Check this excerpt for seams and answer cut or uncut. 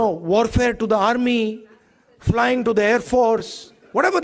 uncut